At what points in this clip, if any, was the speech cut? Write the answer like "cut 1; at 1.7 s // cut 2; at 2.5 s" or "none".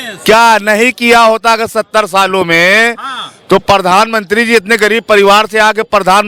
none